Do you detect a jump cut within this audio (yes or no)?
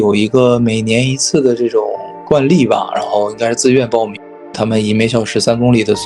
yes